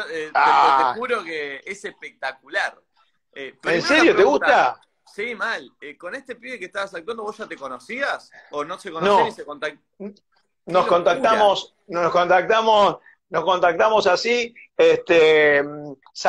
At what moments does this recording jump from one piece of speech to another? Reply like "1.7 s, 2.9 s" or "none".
none